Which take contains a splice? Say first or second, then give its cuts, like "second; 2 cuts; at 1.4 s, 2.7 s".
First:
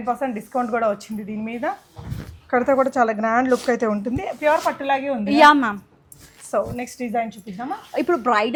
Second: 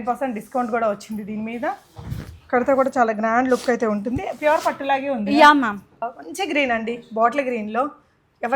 second; 1 cut; at 6.0 s